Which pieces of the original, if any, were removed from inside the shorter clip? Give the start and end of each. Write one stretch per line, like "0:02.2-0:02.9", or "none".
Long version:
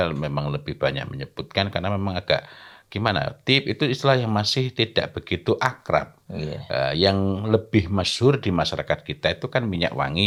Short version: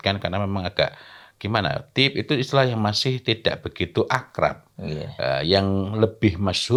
none